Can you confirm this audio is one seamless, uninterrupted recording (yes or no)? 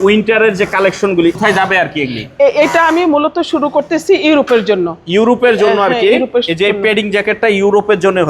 no